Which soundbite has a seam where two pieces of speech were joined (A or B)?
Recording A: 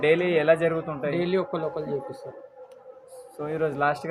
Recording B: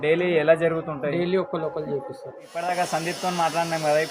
B